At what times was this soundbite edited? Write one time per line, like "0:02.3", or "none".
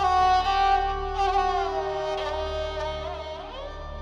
none